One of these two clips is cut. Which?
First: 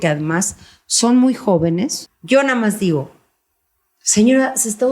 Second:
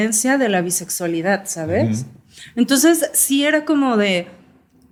first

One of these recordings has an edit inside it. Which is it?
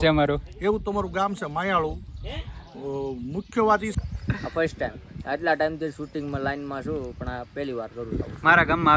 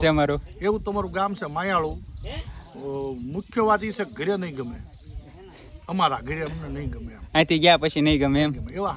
first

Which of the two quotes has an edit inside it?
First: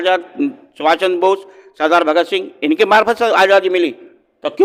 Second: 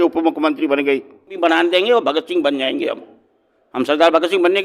second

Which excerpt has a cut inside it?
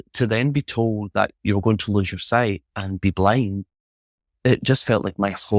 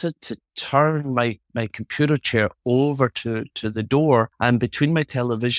second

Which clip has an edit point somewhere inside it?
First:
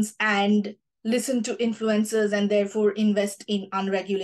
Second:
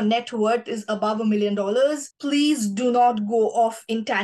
second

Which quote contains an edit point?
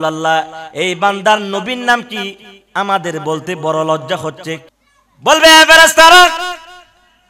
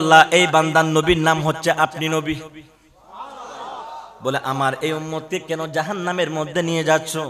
first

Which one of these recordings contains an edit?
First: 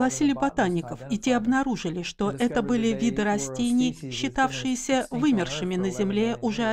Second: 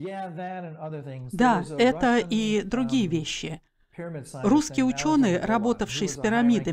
second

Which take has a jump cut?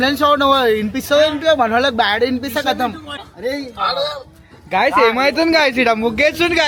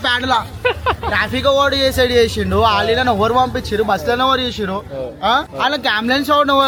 first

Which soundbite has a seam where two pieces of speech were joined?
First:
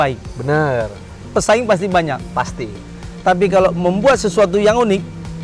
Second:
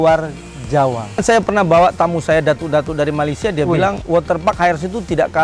second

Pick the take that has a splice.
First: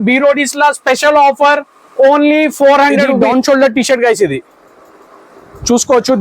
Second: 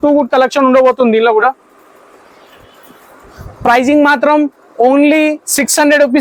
first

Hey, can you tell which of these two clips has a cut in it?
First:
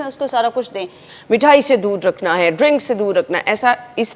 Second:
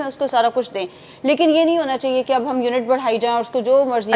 first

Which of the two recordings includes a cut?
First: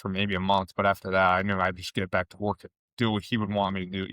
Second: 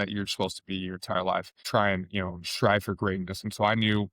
second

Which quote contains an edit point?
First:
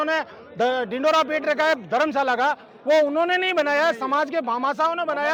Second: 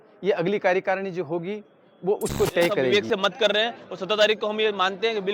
second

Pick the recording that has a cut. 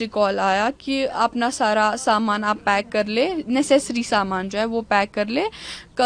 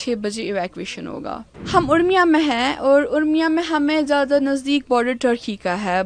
second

